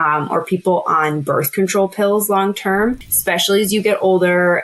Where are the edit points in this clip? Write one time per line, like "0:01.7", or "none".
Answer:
0:03.1